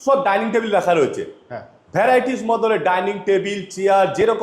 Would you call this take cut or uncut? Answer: uncut